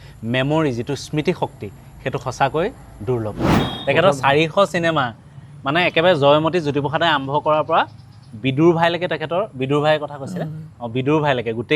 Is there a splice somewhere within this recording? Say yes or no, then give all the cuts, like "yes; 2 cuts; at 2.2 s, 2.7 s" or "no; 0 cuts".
yes; 1 cut; at 3.4 s